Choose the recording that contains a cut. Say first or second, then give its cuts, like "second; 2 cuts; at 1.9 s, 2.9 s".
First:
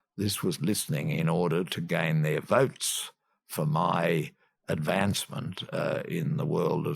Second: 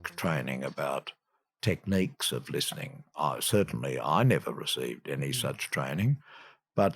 second; 1 cut; at 1.5 s